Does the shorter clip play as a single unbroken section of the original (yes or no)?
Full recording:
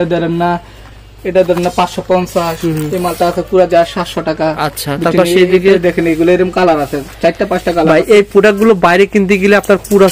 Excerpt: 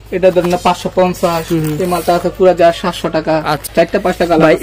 no